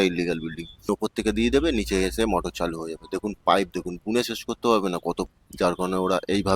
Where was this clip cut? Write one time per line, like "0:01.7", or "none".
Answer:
0:00.9
0:05.3